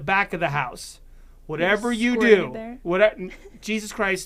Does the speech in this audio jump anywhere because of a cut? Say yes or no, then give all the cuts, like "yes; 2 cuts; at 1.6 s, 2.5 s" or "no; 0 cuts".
no; 0 cuts